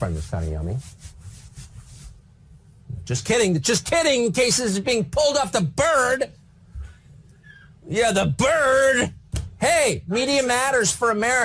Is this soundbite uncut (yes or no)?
yes